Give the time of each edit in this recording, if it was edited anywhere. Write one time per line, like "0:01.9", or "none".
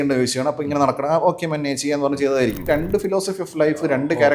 0:02.7